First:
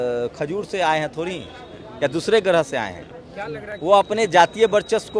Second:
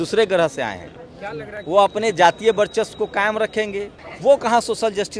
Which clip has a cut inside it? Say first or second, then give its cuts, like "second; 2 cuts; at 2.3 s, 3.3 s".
second; 1 cut; at 4.0 s